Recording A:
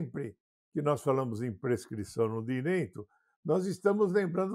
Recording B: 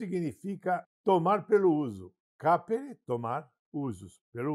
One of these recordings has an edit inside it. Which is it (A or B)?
B